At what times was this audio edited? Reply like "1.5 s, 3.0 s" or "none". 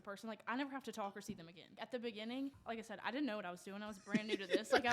1.7 s, 2.6 s